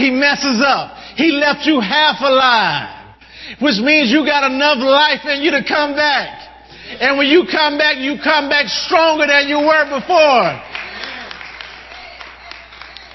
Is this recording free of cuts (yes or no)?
yes